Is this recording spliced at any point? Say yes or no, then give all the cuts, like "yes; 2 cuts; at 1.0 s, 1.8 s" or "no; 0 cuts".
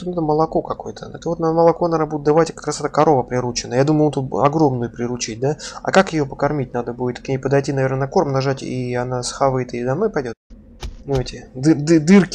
yes; 1 cut; at 10.4 s